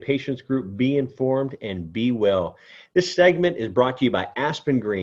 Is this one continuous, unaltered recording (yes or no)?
yes